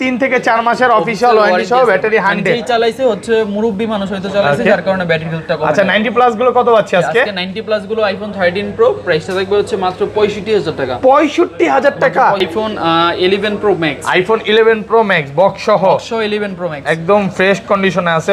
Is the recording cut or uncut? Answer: cut